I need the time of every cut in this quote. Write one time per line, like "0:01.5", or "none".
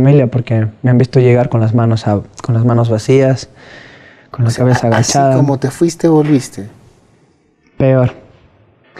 none